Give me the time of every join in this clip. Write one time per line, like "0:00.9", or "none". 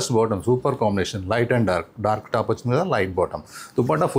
none

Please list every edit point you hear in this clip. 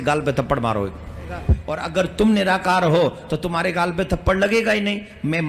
0:01.7

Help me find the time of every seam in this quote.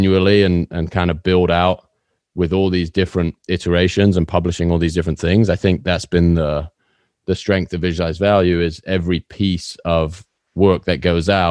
none

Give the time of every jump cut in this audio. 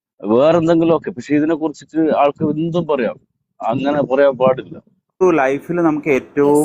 0:05.2

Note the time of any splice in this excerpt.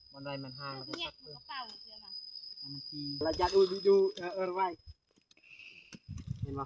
0:03.2

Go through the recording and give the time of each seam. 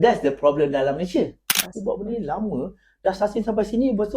0:01.5

